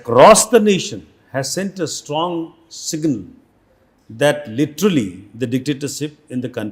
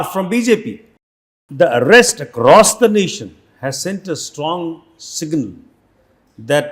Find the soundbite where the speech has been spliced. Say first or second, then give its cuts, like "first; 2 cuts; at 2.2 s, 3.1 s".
second; 1 cut; at 1.2 s